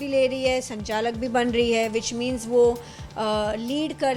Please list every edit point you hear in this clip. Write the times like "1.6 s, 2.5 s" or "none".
none